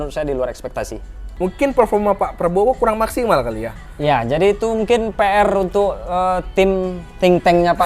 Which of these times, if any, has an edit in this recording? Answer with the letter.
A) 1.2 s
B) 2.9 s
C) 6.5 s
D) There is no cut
A